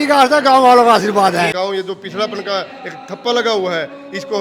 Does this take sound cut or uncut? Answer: cut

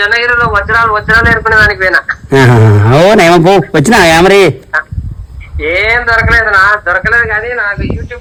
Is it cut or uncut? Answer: uncut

